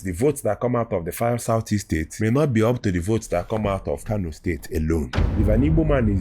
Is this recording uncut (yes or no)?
no